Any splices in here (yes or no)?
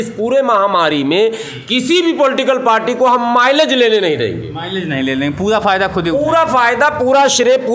no